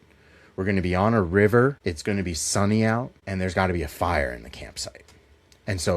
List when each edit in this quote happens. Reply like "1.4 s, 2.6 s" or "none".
1.8 s, 3.2 s

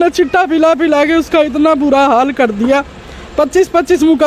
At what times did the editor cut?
none

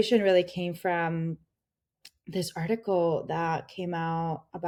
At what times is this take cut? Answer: none

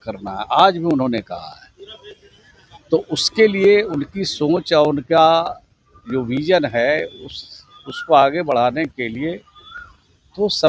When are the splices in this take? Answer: none

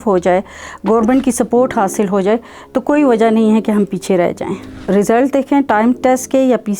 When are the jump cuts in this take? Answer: 4.8 s

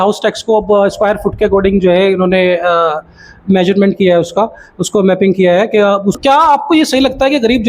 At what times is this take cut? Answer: 6.2 s

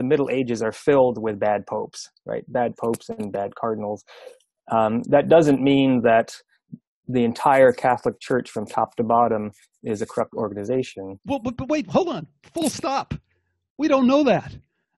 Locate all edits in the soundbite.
none

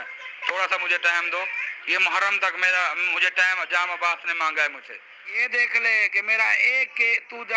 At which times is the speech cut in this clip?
5.4 s

